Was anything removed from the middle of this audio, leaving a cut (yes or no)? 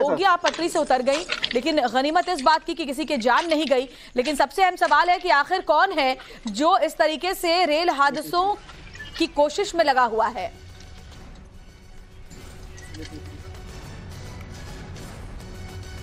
no